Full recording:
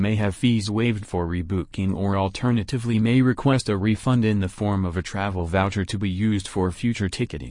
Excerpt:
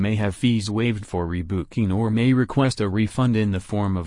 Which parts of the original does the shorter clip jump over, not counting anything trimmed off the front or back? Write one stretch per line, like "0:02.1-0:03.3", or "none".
0:01.8-0:02.6